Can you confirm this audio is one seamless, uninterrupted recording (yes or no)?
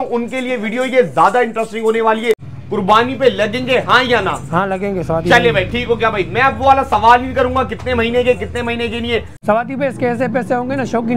no